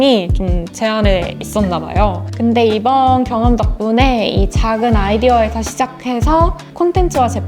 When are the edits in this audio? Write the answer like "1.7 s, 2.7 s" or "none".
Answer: 2.2 s